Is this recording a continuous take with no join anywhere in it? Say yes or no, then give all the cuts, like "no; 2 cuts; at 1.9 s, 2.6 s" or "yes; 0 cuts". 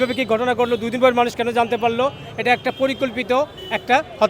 yes; 0 cuts